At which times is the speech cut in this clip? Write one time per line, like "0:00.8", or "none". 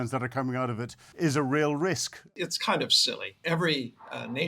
0:01.0
0:02.3
0:03.4